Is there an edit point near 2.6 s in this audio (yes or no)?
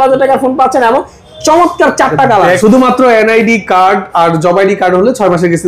yes